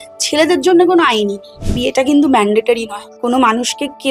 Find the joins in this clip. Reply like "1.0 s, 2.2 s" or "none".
1.7 s